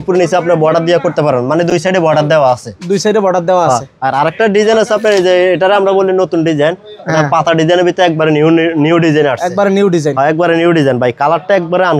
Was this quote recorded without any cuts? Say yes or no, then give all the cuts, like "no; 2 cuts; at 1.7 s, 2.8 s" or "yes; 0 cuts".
yes; 0 cuts